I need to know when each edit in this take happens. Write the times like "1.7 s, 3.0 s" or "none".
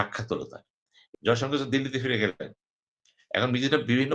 1.0 s

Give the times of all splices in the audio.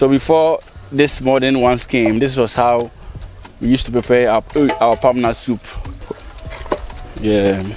6.1 s

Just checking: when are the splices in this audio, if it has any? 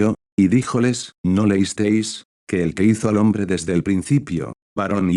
1.1 s

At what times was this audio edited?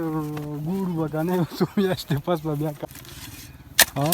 2.8 s

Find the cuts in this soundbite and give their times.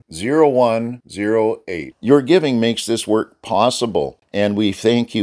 4.2 s

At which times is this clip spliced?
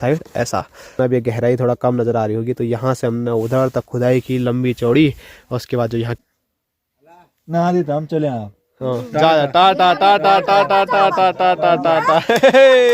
1.0 s, 6.1 s

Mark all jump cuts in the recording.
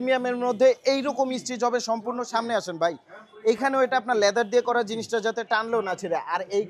none

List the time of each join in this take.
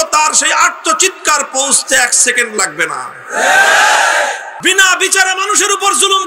4.5 s

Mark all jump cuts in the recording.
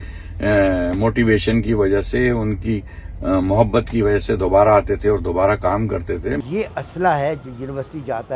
6.4 s

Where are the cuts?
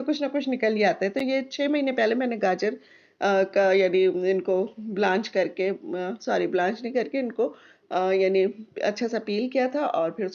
none

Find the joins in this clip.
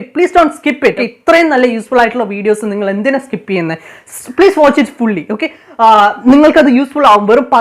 1.0 s

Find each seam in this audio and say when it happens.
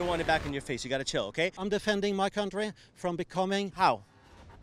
1.6 s

